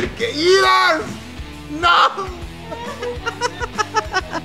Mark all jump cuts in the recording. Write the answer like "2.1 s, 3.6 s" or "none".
none